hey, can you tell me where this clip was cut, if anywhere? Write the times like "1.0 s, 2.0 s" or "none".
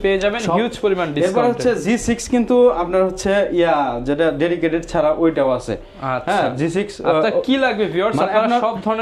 none